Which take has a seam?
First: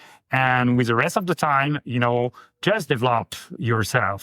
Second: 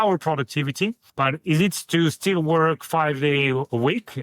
second; 1 cut; at 1.0 s

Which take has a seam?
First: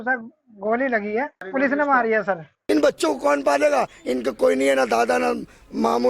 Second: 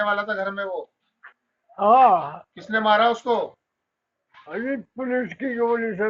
first; 2 cuts; at 1.4 s, 2.5 s

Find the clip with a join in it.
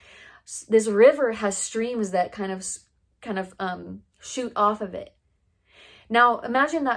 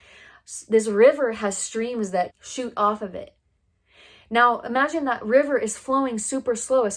second; 1 cut; at 2.3 s

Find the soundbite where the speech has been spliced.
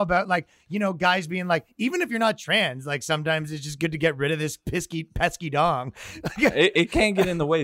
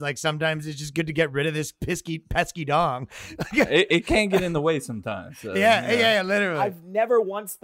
second; 1 cut; at 6.6 s

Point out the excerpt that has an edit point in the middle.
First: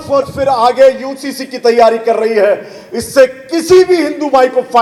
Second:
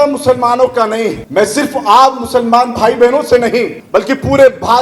second; 2 cuts; at 1.2 s, 3.8 s

